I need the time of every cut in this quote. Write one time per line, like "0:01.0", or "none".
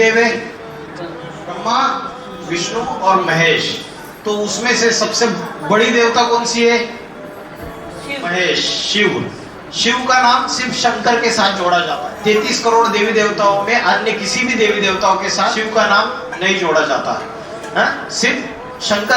0:01.5
0:08.3
0:12.0
0:15.6